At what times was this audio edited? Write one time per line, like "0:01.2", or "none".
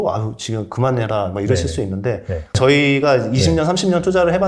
0:02.6